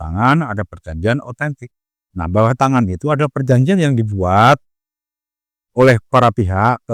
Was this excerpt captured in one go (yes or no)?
yes